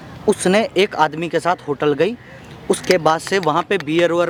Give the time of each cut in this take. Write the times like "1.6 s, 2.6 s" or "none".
none